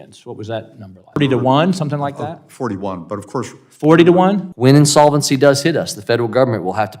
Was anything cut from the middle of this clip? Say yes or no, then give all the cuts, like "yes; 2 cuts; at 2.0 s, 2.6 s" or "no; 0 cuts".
yes; 2 cuts; at 1.2 s, 4.5 s